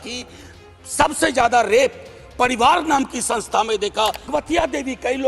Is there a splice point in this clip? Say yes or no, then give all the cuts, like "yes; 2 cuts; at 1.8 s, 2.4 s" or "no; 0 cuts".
yes; 1 cut; at 4.3 s